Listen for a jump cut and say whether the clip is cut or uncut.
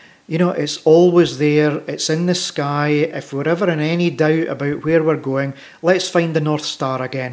uncut